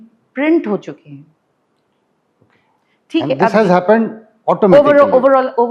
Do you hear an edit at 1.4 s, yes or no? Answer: no